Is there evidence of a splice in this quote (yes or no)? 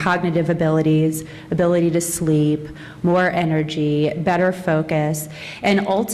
yes